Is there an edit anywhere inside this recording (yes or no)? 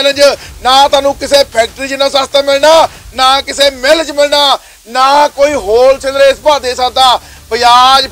no